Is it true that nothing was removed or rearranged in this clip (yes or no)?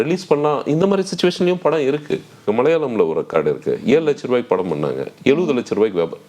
no